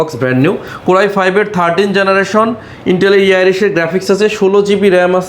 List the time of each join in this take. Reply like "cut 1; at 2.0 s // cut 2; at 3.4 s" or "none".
none